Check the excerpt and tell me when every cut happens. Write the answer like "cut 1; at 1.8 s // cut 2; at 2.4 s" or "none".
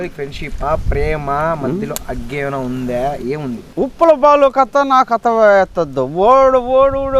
cut 1; at 3.7 s